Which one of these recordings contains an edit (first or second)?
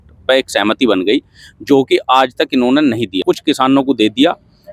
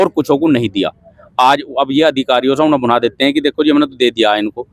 first